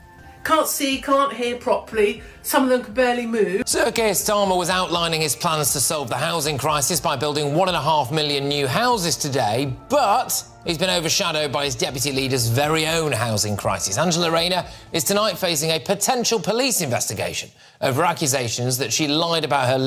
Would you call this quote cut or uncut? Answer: cut